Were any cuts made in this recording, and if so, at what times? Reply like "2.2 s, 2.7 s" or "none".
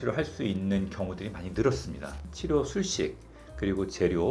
2.3 s